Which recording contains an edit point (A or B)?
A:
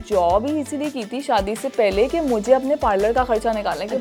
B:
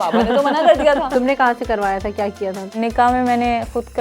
B